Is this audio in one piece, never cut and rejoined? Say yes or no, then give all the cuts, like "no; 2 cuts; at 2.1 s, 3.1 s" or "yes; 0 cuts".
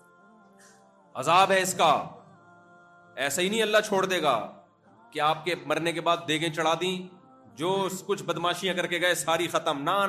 yes; 0 cuts